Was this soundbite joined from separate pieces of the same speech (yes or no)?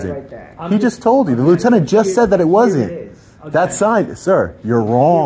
no